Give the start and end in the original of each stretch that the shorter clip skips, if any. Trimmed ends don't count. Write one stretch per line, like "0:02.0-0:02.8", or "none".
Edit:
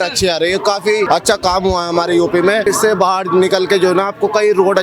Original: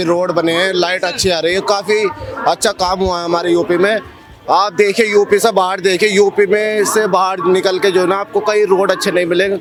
0:02.1-0:02.4
0:04.0-0:06.8